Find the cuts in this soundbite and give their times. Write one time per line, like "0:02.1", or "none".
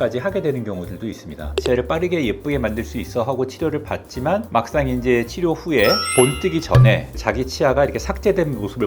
0:01.6